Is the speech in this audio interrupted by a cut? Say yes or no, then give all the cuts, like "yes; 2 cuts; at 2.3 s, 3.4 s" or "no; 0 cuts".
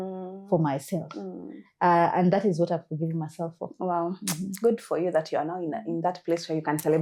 no; 0 cuts